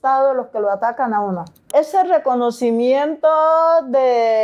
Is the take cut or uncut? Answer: cut